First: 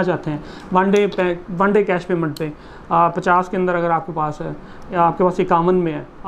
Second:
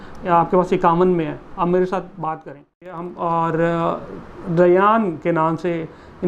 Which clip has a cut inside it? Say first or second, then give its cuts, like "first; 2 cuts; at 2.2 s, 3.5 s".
second; 1 cut; at 3.0 s